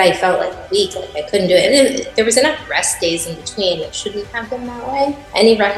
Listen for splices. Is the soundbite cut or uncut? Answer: uncut